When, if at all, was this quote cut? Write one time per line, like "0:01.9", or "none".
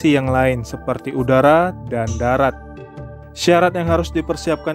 none